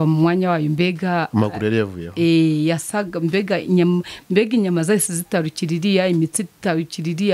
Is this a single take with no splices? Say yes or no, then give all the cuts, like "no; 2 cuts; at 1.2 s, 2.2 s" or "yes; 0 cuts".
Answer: yes; 0 cuts